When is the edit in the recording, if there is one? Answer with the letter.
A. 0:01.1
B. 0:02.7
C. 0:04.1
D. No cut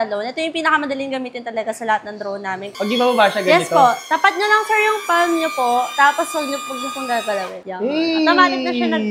B